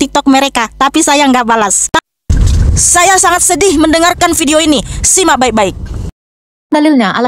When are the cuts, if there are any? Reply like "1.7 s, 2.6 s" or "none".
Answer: 2.0 s